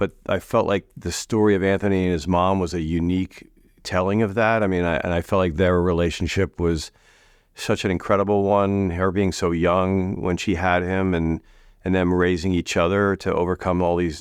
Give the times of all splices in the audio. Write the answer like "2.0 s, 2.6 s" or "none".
none